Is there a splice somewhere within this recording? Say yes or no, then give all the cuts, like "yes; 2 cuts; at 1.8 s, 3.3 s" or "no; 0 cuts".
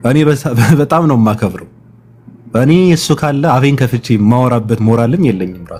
no; 0 cuts